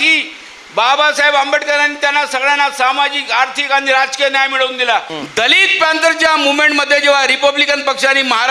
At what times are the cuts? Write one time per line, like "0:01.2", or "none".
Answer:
0:05.2

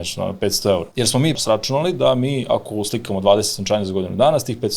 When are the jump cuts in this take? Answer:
0:01.3

